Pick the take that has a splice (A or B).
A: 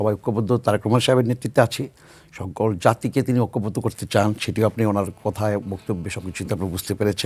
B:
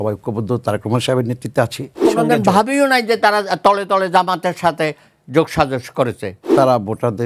B